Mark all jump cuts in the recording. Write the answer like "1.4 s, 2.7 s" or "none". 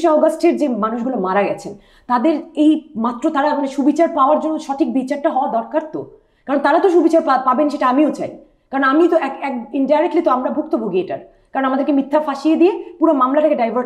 none